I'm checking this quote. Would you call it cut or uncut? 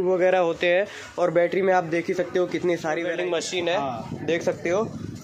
cut